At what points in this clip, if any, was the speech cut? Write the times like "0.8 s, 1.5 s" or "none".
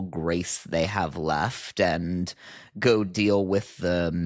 none